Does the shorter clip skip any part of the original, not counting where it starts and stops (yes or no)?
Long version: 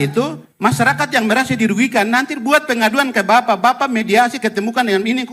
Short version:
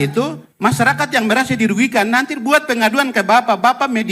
no